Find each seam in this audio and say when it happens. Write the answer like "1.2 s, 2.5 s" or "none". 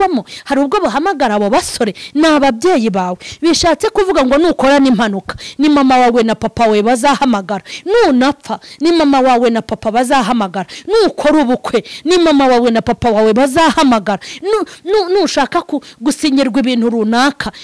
none